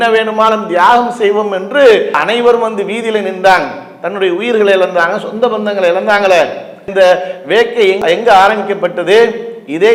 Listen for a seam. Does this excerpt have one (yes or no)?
no